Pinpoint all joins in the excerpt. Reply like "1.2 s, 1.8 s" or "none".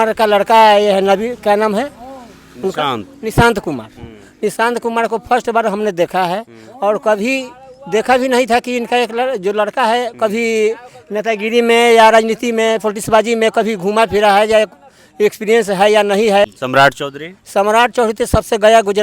16.5 s